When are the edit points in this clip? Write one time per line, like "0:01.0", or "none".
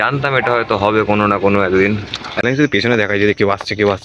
0:02.4